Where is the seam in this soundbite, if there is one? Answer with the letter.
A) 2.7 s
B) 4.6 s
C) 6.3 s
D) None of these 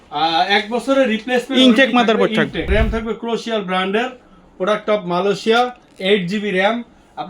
A